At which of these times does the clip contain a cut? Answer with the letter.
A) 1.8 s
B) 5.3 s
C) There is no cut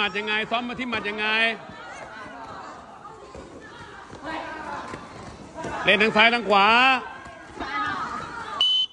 C